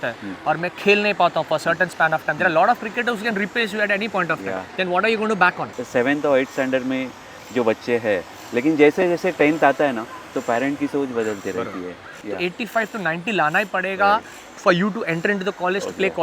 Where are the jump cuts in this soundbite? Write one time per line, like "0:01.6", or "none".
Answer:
0:05.6
0:12.2